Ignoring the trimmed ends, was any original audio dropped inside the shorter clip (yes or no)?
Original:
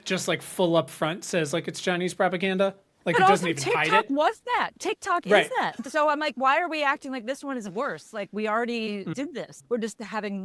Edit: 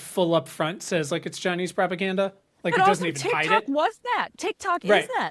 no